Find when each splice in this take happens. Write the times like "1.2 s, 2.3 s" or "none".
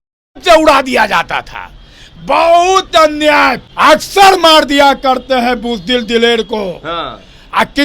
3.6 s